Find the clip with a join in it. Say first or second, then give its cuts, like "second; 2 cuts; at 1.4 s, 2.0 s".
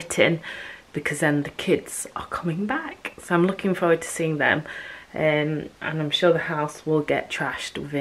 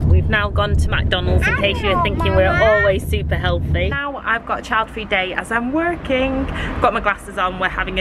second; 1 cut; at 4.0 s